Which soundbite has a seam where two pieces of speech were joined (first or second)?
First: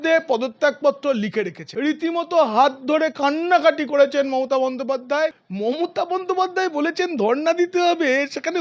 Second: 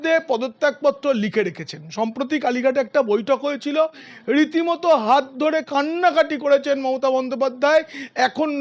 first